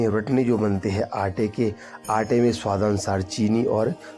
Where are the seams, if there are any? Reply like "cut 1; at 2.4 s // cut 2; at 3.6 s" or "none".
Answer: none